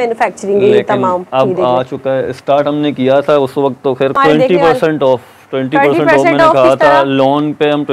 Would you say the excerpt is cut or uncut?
cut